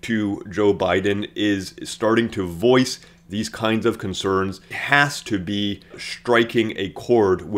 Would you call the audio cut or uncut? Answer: cut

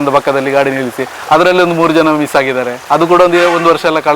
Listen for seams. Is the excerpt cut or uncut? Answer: cut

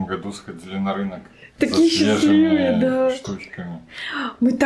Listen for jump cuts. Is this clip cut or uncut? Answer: uncut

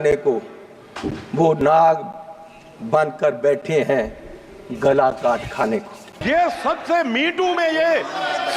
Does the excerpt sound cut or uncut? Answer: cut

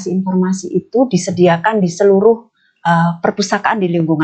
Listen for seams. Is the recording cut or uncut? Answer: uncut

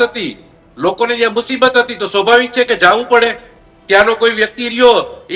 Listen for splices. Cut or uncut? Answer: uncut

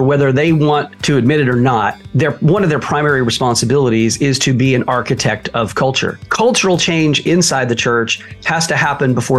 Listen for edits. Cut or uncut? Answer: cut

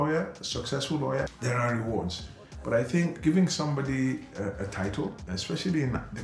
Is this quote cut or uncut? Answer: cut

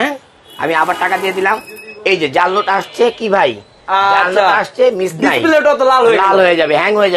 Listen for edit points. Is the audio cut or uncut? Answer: uncut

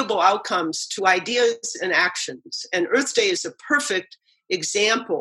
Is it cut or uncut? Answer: uncut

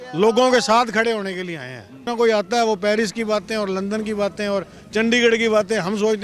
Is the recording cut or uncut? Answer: cut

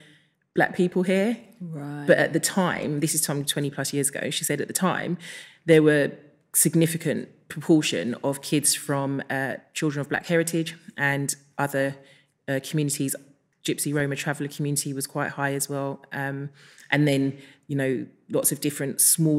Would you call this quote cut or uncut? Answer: uncut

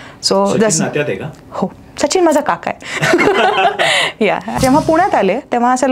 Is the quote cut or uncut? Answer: cut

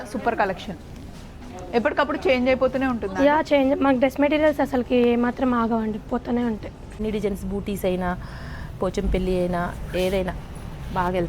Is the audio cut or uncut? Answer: cut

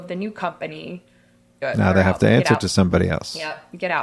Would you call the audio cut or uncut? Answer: cut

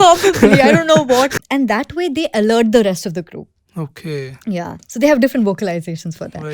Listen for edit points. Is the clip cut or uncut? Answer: cut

